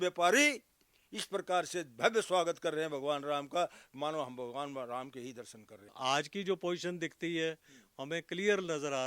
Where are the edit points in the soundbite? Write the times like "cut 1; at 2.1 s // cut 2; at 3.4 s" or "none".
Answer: cut 1; at 5.9 s